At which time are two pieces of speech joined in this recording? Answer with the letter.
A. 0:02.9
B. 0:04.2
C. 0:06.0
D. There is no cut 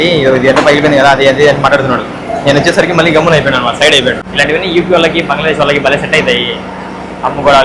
B